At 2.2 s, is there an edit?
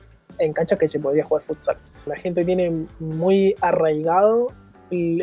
yes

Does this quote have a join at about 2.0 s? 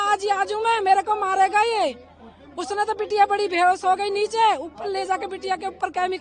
no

